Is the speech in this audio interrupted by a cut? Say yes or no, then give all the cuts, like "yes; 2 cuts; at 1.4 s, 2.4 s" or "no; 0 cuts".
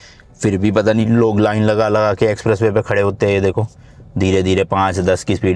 no; 0 cuts